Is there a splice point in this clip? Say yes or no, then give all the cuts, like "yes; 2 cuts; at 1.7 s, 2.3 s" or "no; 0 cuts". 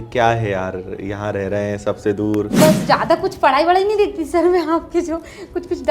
yes; 1 cut; at 2.5 s